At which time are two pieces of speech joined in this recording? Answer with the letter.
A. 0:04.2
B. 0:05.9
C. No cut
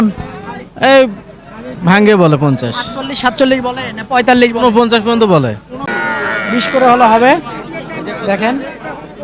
B